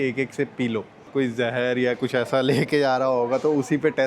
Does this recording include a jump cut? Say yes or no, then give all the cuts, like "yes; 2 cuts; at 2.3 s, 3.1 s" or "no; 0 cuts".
yes; 1 cut; at 1.0 s